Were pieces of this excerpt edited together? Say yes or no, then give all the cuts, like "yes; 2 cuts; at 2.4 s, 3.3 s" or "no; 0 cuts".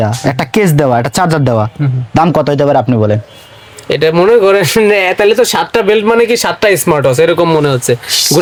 no; 0 cuts